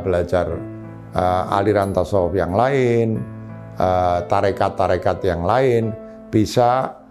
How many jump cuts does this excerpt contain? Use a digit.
0